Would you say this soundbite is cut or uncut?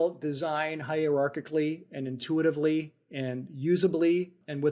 uncut